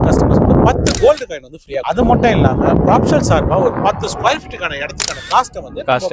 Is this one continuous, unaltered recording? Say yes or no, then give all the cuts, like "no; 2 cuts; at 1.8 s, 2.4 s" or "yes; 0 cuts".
yes; 0 cuts